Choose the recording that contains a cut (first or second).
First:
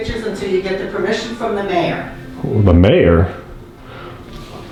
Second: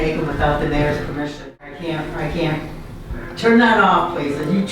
second